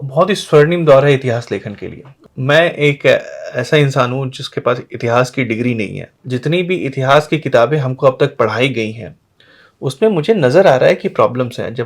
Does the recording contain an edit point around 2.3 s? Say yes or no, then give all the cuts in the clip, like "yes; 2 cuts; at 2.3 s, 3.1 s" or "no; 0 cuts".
yes; 2 cuts; at 2.3 s, 6.2 s